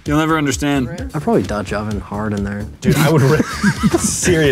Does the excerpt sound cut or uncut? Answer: cut